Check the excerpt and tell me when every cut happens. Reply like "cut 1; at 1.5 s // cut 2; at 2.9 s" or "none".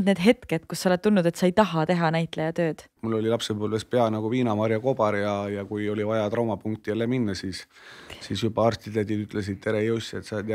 cut 1; at 2.9 s